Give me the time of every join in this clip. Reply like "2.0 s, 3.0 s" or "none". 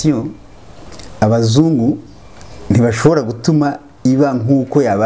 none